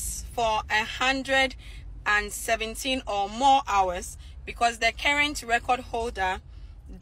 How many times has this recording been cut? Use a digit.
0